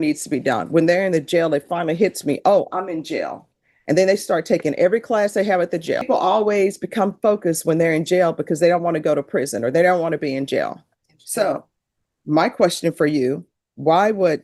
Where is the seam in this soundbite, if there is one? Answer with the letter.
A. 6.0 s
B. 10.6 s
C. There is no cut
A